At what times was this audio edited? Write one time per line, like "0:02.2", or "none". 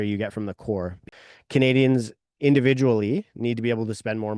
0:01.0